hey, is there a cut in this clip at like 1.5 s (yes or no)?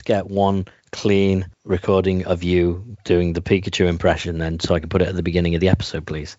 yes